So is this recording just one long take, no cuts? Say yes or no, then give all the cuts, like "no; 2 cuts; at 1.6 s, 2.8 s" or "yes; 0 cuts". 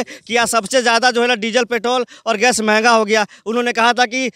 yes; 0 cuts